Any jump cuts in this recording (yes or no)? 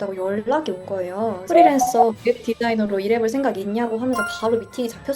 no